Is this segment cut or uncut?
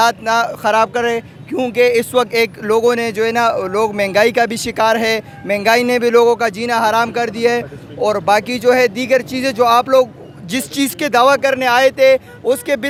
uncut